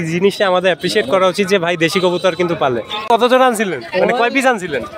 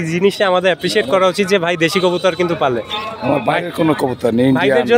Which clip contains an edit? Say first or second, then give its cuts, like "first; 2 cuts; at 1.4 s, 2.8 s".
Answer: first; 1 cut; at 3.1 s